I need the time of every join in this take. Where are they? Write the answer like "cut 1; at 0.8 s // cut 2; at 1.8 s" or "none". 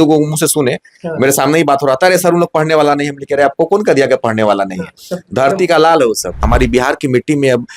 cut 1; at 6.4 s